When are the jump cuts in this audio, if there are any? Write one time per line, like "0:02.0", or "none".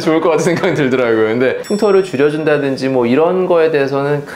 0:01.6